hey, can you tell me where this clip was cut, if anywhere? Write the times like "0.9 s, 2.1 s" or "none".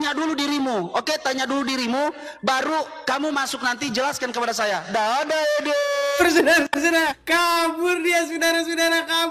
7.2 s